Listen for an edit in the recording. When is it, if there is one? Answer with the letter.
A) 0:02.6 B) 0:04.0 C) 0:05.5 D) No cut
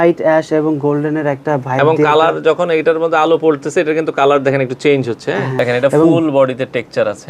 C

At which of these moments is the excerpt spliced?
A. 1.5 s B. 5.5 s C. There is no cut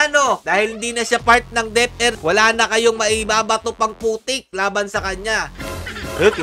B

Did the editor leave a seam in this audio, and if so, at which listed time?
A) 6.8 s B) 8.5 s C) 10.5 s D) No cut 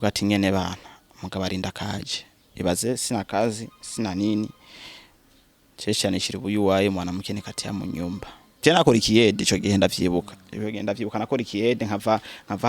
B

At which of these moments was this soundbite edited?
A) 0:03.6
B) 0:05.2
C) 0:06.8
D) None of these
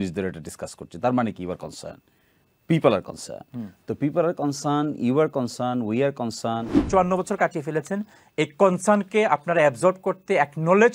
C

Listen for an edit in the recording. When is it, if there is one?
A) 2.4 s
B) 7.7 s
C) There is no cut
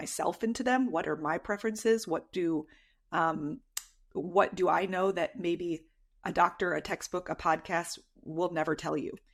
C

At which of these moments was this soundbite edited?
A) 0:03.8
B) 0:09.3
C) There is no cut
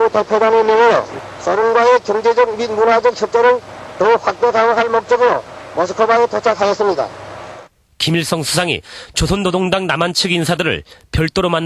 A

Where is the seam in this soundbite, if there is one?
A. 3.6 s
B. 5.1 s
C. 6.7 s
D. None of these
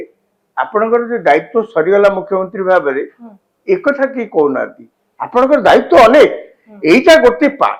D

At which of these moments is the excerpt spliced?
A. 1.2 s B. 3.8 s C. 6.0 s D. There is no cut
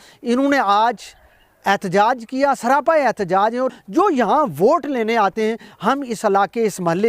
B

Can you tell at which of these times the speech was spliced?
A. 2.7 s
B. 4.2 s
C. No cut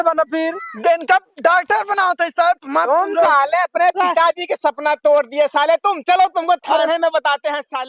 C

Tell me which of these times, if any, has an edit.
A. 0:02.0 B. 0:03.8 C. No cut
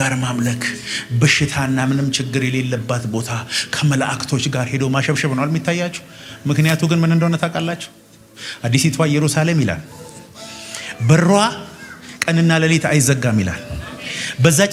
C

